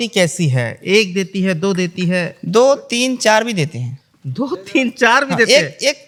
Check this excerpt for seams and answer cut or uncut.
uncut